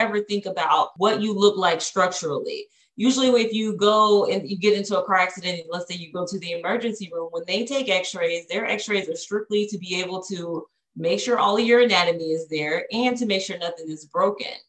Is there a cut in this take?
yes; 1 cut; at 0.9 s

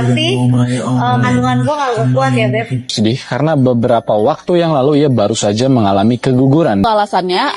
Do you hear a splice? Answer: yes; 2 cuts; at 2.9 s, 6.8 s

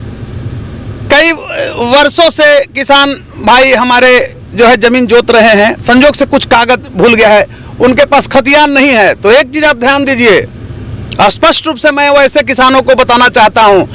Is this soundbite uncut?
yes; 0 cuts

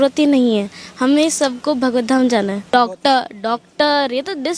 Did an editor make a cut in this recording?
yes; 1 cut; at 2.6 s

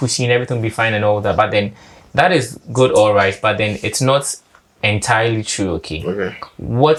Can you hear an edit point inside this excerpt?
no; 0 cuts

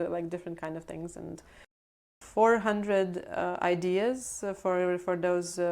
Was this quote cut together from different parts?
yes; 1 cut; at 2.1 s

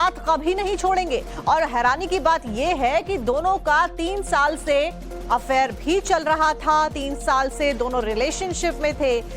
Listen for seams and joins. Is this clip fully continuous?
no; 1 cut; at 2.3 s

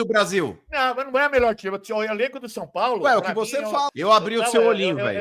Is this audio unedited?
no; 1 cut; at 3.9 s

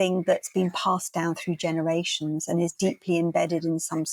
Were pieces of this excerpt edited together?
no; 0 cuts

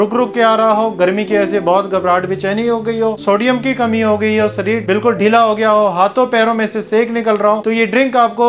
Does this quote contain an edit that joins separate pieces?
no; 0 cuts

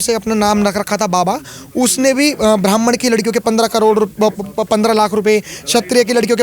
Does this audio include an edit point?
no; 0 cuts

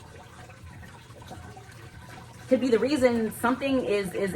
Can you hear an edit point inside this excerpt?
no; 0 cuts

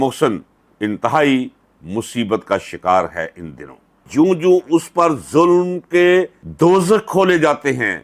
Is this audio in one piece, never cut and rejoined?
no; 1 cut; at 4.1 s

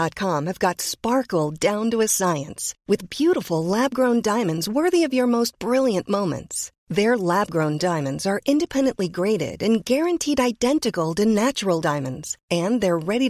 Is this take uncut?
yes; 0 cuts

